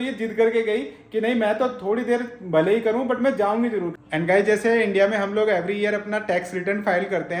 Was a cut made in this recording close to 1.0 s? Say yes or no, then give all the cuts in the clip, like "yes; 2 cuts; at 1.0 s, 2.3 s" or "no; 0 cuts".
no; 1 cut; at 3.9 s